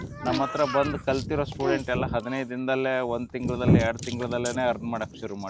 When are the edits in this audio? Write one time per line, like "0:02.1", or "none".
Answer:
none